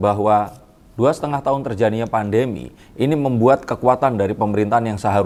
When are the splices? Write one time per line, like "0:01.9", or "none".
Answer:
none